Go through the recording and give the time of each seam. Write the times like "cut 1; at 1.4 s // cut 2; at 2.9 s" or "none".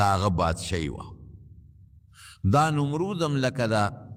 none